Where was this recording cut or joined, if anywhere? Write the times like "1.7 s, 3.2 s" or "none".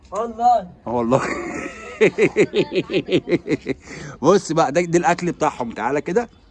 none